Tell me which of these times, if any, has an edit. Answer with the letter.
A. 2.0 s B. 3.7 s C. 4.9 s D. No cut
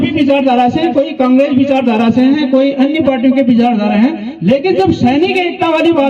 D